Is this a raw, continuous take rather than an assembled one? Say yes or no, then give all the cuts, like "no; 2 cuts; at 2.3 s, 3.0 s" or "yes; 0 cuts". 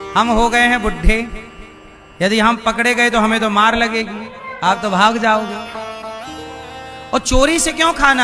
yes; 0 cuts